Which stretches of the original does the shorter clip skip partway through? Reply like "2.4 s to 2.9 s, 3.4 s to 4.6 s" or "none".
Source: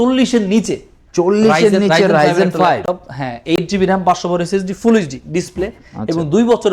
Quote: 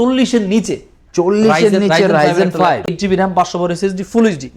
2.9 s to 3.6 s